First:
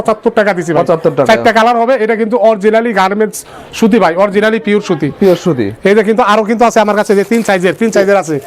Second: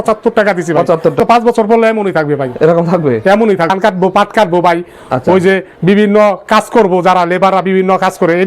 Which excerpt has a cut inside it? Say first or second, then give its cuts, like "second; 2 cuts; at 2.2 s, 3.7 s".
second; 2 cuts; at 1.2 s, 3.7 s